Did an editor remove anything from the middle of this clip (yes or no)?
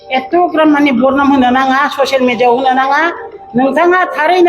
no